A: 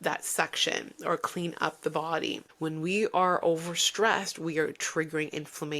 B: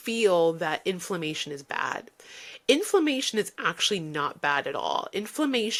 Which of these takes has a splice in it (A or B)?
A